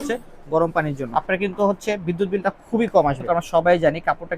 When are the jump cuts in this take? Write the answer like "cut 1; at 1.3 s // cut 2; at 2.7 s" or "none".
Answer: cut 1; at 1.0 s // cut 2; at 3.2 s